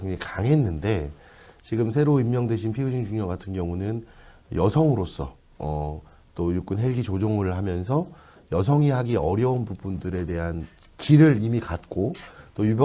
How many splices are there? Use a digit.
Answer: 0